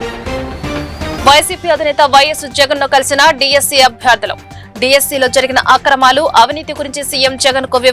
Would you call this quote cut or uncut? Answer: cut